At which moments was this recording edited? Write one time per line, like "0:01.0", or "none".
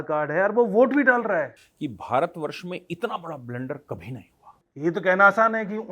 0:01.6
0:04.6